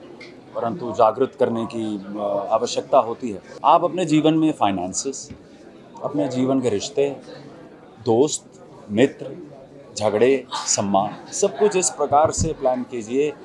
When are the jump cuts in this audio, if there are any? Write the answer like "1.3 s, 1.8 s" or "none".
3.5 s